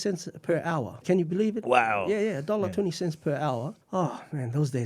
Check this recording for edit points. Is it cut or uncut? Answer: cut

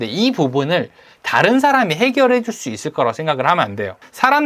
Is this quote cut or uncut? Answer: uncut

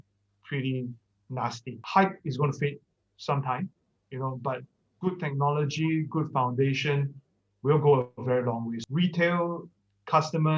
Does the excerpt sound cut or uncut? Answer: cut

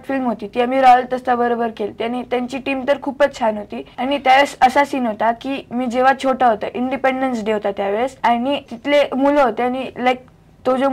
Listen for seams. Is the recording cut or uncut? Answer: uncut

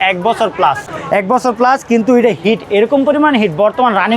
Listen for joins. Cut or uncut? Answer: uncut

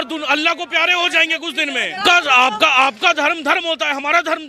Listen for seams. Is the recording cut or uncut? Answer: cut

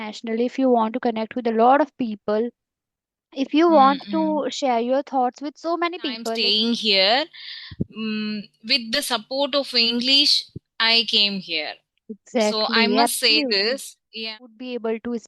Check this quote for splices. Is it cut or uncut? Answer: cut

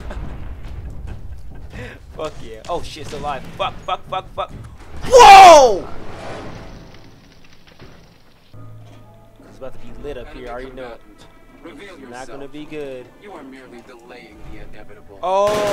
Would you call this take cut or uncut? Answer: cut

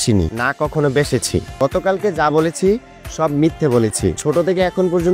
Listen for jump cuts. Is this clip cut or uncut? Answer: cut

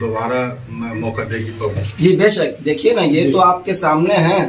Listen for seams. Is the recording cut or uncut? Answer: cut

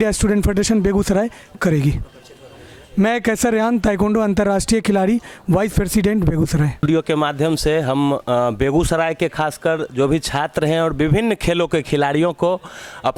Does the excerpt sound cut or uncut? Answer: uncut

